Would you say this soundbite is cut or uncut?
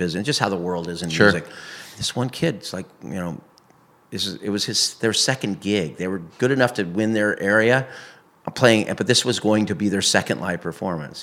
uncut